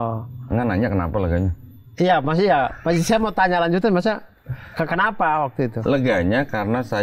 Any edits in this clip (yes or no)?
no